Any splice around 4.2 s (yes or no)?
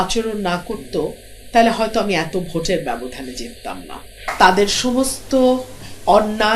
yes